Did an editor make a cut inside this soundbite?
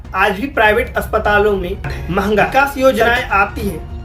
yes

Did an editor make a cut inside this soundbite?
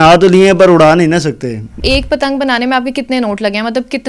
yes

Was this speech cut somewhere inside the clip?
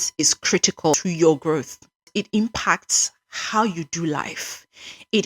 yes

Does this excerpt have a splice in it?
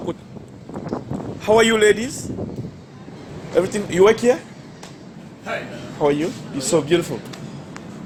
no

